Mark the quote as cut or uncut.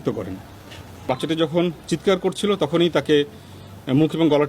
cut